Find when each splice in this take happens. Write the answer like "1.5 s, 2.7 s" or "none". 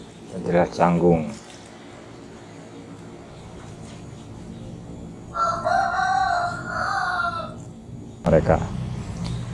8.2 s